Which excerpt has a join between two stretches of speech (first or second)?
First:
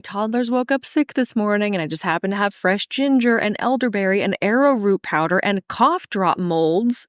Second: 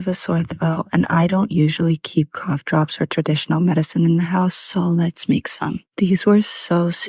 second